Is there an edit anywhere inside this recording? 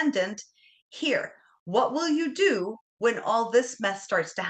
no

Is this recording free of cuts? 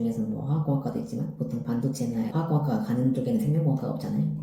yes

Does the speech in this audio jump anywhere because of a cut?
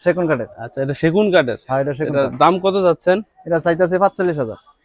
no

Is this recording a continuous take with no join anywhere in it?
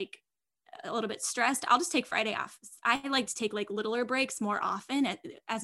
yes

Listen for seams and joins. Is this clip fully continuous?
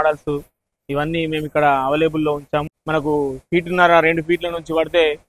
no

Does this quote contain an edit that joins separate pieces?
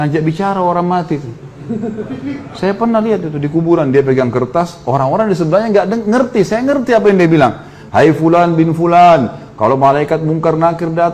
no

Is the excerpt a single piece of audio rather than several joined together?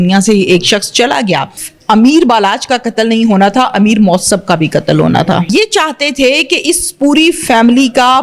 no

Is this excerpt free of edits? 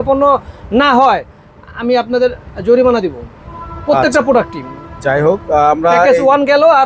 yes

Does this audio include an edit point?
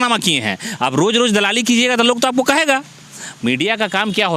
no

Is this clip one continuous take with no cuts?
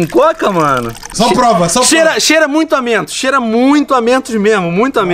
no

